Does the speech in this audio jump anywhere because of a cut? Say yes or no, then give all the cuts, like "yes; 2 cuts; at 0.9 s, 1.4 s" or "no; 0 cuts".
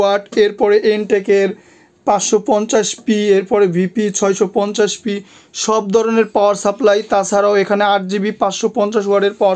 no; 0 cuts